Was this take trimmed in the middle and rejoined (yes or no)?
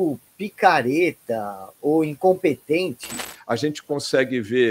yes